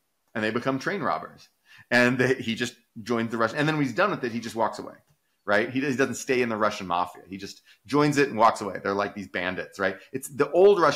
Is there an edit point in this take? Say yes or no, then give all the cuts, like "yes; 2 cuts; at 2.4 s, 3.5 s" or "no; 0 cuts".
no; 0 cuts